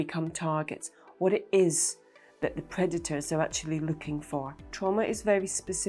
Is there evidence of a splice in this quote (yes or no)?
yes